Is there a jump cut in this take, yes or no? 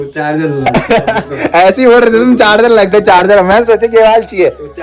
no